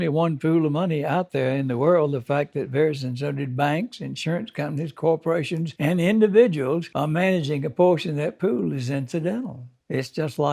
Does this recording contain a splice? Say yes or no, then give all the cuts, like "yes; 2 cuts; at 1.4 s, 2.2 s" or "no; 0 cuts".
yes; 2 cuts; at 5.7 s, 6.9 s